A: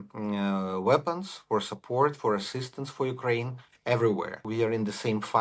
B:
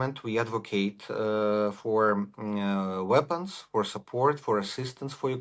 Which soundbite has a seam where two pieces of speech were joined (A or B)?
A